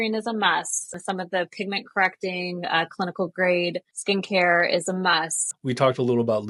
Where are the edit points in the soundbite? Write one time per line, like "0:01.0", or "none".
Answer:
0:00.9
0:03.9
0:05.4